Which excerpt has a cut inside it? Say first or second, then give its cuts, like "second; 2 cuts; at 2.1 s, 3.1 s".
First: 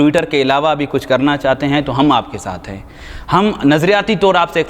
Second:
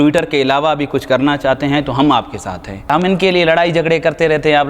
second; 1 cut; at 2.9 s